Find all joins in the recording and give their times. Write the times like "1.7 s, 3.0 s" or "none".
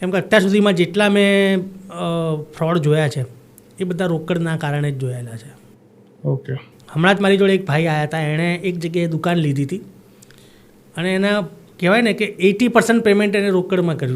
none